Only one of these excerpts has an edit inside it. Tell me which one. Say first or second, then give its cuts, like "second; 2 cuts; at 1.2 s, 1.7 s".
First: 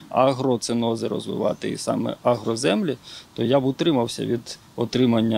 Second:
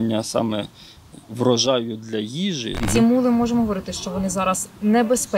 second; 1 cut; at 2.8 s